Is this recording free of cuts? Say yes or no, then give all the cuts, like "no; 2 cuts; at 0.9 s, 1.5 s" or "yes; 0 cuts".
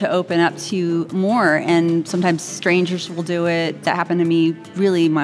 no; 1 cut; at 3.8 s